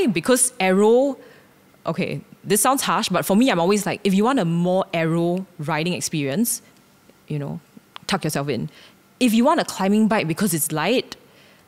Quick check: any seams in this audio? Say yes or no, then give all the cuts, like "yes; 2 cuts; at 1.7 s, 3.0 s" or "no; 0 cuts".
no; 0 cuts